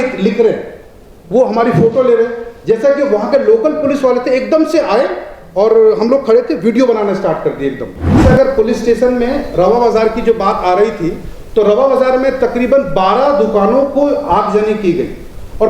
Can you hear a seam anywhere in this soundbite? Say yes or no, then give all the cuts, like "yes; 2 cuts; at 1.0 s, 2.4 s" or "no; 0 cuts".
yes; 1 cut; at 8.1 s